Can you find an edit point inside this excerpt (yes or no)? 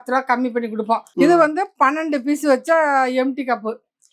yes